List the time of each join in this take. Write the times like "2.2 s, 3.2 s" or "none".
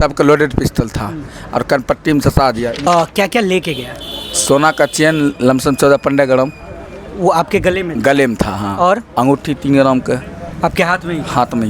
2.9 s